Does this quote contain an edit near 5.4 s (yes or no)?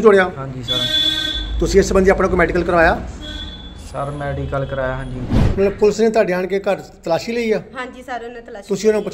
yes